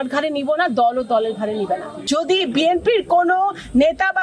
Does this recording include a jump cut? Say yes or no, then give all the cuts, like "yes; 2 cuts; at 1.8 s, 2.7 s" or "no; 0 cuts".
yes; 1 cut; at 2.2 s